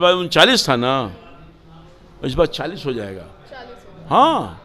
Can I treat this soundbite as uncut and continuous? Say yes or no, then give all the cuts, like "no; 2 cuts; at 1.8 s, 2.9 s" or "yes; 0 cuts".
yes; 0 cuts